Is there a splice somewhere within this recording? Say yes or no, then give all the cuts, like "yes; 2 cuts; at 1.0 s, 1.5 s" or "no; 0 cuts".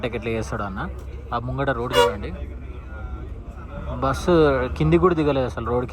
no; 0 cuts